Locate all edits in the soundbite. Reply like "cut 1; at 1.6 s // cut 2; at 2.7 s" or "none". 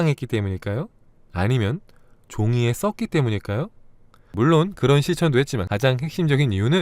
cut 1; at 4.3 s // cut 2; at 5.6 s